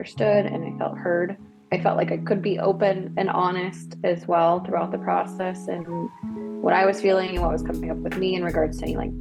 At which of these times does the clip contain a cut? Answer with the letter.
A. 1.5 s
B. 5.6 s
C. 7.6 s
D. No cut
A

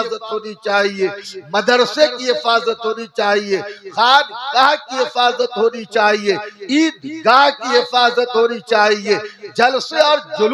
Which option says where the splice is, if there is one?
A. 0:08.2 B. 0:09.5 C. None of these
C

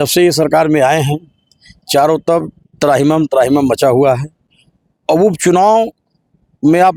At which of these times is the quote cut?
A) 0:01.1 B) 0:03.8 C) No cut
C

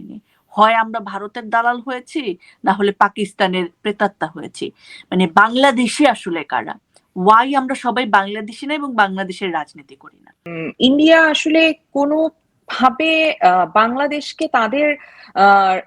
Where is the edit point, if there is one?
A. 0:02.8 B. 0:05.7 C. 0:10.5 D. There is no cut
C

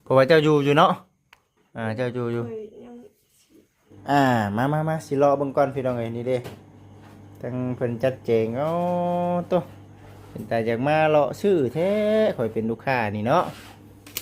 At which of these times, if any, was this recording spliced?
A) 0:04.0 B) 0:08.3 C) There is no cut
A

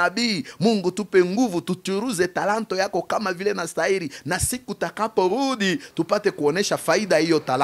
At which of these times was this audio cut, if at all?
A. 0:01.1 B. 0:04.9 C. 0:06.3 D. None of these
D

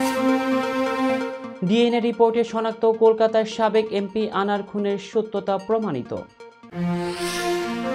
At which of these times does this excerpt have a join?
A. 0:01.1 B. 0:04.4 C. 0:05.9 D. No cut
A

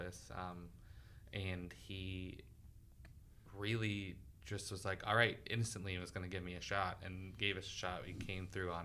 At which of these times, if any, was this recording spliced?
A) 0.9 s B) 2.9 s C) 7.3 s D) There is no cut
D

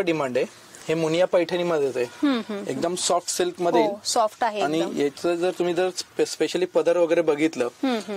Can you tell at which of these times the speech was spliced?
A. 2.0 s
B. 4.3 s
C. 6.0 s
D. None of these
D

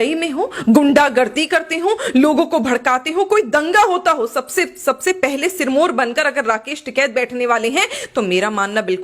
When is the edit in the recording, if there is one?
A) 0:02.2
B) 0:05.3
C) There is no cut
C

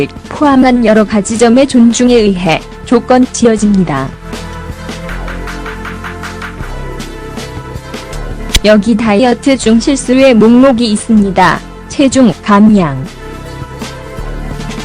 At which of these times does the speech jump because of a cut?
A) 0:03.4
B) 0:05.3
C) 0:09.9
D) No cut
A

